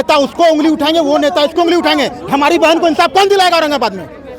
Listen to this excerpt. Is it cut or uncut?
uncut